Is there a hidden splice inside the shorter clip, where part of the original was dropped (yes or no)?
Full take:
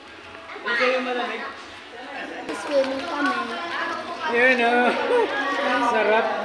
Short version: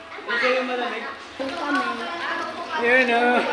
yes